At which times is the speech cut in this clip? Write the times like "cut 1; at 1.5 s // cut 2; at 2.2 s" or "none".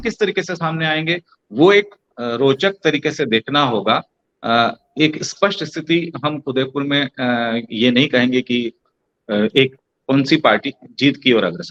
none